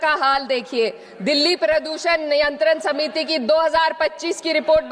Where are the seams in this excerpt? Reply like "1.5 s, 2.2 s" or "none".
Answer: none